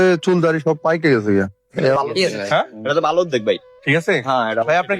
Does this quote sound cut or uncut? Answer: cut